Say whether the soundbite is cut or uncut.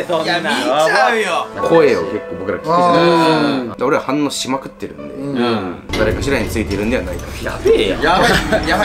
cut